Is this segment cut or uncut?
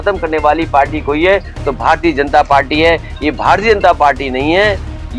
uncut